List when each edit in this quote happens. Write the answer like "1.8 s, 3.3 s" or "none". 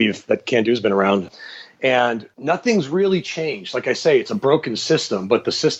1.3 s, 2.3 s